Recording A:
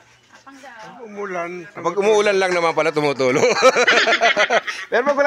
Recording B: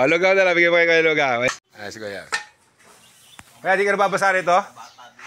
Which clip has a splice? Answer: B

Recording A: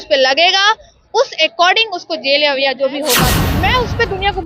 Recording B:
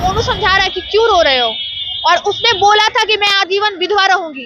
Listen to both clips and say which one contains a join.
A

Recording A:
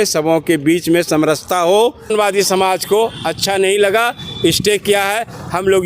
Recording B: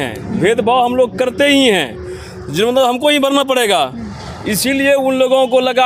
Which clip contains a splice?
A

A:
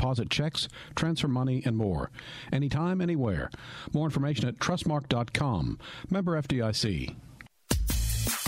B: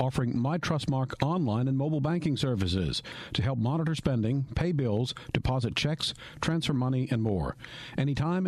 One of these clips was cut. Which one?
A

